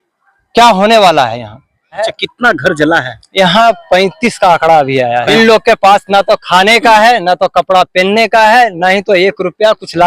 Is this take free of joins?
no; 2 cuts; at 2.0 s, 5.3 s

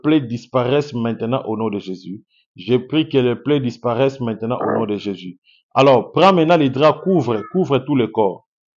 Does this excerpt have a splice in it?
no; 0 cuts

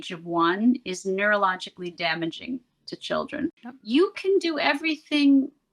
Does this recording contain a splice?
yes; 1 cut; at 3.6 s

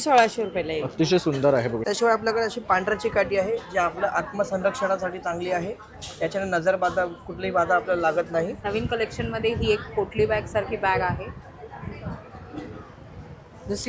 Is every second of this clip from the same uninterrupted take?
no; 2 cuts; at 1.8 s, 8.6 s

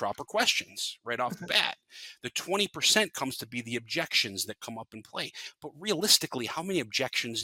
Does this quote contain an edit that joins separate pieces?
no; 0 cuts

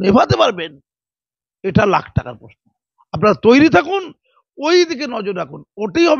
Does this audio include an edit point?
no; 0 cuts

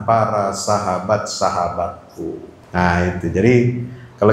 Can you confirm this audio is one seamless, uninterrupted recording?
no; 1 cut; at 2.5 s

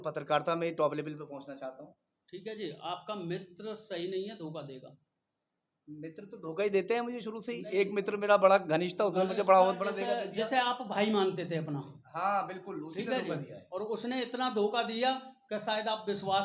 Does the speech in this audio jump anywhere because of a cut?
no; 0 cuts

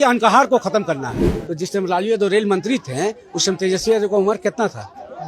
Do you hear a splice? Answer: yes; 1 cut; at 1.3 s

